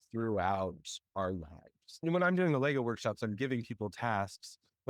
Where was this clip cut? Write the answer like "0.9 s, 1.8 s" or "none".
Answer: 2.0 s